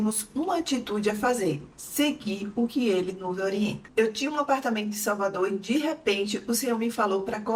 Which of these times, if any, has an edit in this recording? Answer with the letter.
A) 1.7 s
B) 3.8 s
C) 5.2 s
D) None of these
D